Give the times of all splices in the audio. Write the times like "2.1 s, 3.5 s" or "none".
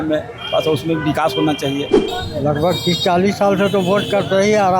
2.0 s